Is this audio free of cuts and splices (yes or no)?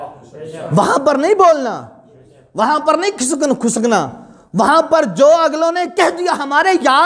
yes